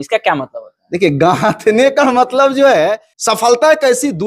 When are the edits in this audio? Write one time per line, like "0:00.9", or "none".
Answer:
0:03.1